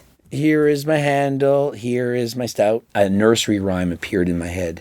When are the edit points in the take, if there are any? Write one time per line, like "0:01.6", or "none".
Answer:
0:02.9